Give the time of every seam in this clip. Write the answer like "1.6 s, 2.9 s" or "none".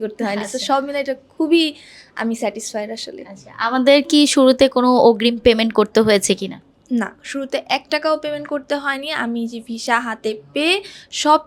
none